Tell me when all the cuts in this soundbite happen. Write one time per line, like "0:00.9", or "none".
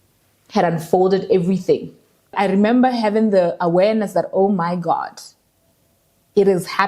0:02.3